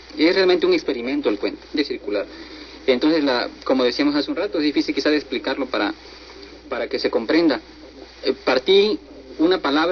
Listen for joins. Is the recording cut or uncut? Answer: uncut